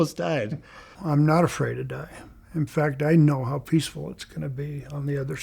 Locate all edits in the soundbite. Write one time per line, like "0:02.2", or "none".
0:00.9